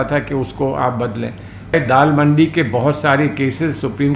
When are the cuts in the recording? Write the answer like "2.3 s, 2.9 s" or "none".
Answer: 1.7 s